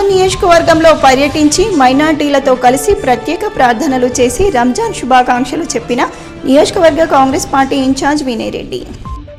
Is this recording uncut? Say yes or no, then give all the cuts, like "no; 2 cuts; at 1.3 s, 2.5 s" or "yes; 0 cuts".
yes; 0 cuts